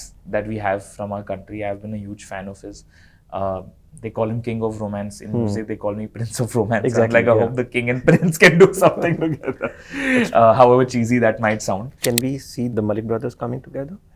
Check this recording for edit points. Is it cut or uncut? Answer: cut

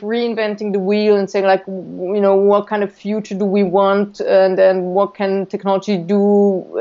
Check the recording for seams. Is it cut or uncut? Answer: uncut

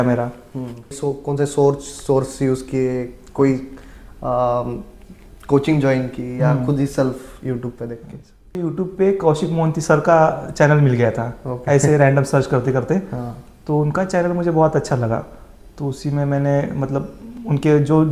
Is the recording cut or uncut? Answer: cut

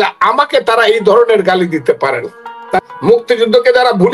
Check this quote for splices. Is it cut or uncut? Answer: cut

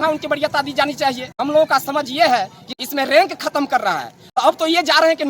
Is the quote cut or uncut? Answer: cut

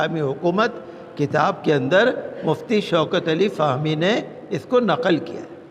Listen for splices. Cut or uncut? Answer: uncut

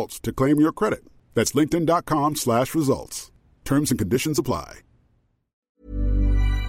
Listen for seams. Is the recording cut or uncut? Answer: cut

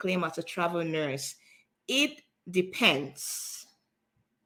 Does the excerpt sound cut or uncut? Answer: uncut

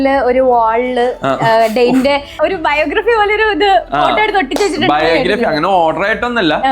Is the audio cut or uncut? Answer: cut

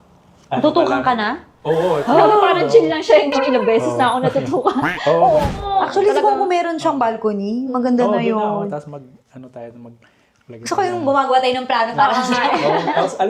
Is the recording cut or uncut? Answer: cut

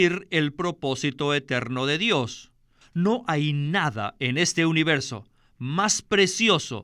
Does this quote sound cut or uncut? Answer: cut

